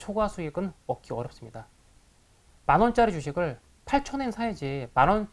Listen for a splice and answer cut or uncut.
uncut